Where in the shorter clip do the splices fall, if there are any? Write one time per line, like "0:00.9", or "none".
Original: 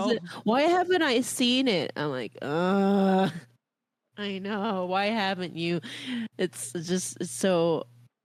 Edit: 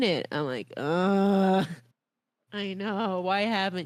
none